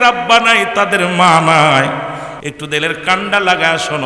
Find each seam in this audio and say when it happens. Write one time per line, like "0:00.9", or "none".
0:02.3